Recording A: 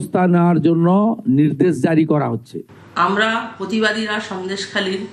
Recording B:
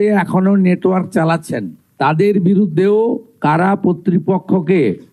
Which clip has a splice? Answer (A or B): A